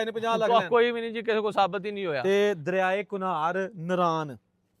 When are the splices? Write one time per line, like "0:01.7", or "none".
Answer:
0:02.2